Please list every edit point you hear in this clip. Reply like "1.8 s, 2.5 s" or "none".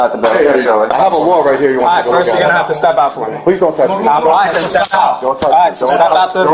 0.9 s